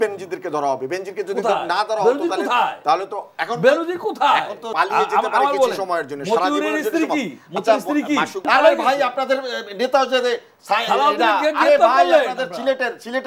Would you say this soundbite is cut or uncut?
cut